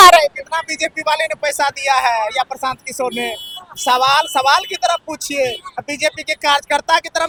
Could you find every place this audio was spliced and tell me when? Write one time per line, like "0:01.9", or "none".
none